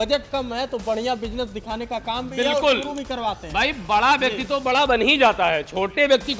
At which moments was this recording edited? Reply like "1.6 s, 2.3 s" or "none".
none